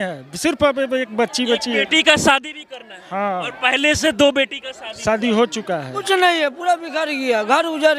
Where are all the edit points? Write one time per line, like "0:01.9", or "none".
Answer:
none